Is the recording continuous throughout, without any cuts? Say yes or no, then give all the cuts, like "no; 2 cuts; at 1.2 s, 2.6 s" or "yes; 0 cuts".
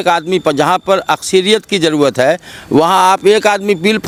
yes; 0 cuts